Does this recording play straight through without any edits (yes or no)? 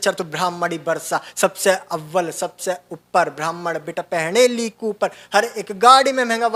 yes